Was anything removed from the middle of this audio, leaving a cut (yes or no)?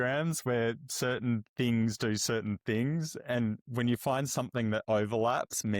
no